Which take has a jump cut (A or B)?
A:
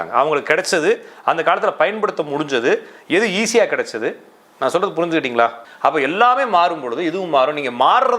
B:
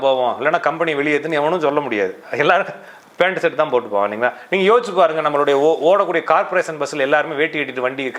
A